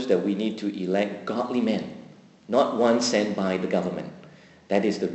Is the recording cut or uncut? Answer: uncut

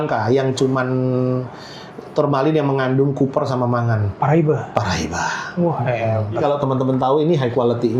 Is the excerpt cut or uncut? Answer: cut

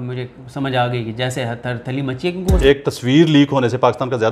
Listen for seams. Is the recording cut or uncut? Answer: cut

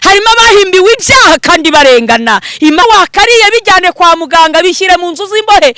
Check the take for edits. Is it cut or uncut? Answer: cut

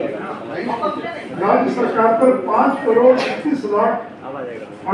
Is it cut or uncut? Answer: uncut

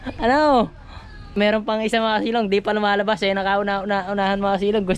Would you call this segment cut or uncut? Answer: cut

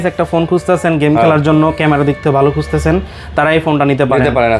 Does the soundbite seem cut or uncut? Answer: uncut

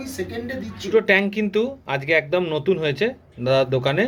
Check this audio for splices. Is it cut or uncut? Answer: cut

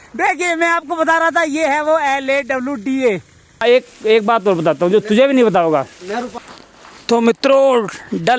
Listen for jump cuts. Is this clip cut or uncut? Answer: cut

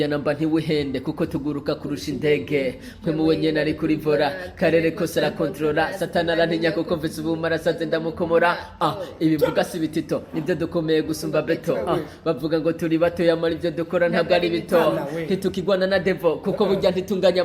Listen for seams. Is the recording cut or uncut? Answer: uncut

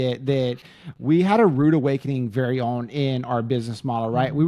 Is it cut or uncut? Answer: uncut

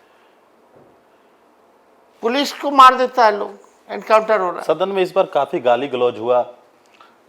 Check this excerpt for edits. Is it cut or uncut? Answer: uncut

